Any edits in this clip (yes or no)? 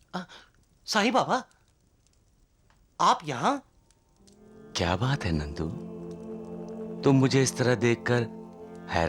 no